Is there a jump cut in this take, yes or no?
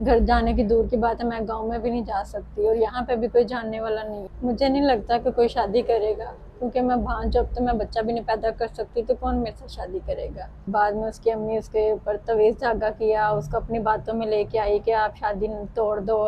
yes